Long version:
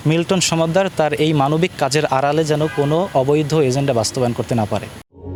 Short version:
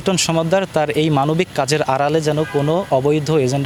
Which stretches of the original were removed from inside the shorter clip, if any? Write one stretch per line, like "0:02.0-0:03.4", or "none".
none